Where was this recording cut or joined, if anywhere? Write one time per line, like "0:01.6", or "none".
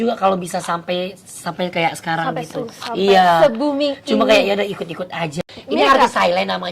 0:05.4